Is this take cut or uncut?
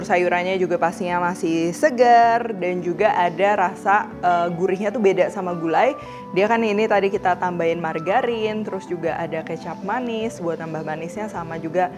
uncut